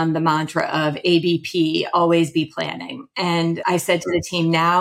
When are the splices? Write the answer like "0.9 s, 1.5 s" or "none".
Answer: 3.6 s